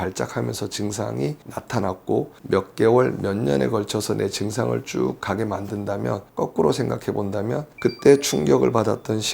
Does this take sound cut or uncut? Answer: cut